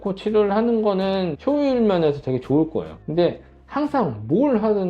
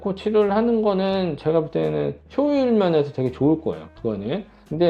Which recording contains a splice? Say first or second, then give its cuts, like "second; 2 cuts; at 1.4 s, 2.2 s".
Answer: first; 2 cuts; at 1.3 s, 3.0 s